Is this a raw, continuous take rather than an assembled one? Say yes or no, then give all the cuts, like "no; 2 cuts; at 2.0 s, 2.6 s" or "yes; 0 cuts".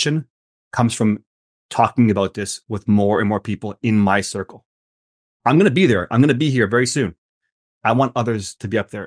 yes; 0 cuts